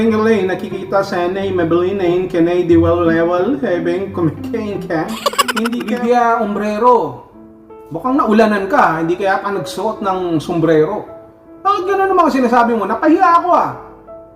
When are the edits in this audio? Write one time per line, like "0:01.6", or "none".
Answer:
0:05.8